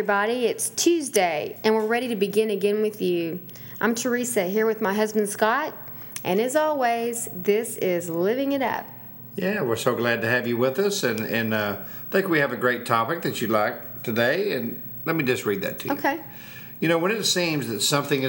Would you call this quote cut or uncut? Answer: cut